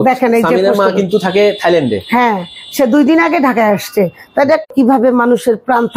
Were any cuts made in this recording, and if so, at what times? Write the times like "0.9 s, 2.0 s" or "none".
4.7 s